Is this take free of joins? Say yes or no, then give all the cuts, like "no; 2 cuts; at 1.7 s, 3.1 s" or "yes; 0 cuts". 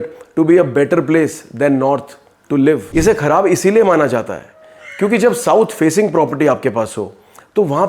no; 1 cut; at 2.9 s